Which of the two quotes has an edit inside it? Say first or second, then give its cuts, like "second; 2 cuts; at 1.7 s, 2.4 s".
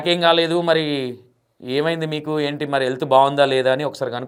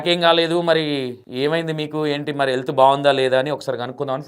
second; 1 cut; at 1.2 s